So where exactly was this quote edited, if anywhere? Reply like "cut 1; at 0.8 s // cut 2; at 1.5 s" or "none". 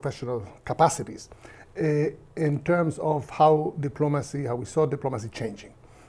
none